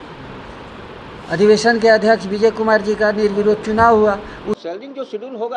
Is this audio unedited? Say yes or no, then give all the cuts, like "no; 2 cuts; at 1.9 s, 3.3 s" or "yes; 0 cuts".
no; 1 cut; at 4.6 s